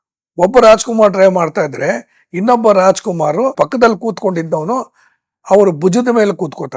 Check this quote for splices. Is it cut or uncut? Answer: uncut